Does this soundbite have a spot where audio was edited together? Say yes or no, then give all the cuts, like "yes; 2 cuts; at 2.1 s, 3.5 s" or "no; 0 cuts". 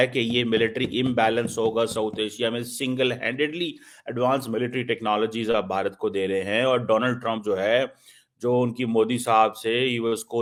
no; 0 cuts